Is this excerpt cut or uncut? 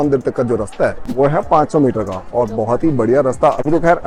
uncut